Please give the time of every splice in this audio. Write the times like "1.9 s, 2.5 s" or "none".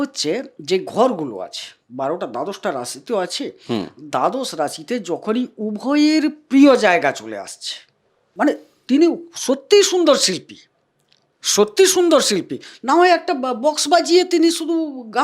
8.2 s